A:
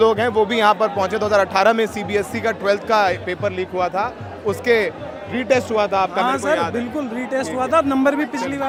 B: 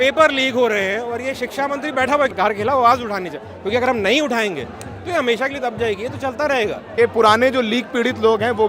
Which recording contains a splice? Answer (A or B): B